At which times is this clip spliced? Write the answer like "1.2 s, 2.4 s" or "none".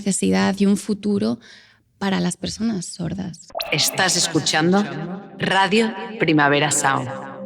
3.4 s